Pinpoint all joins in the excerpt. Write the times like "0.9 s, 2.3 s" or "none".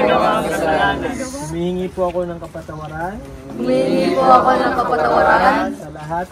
none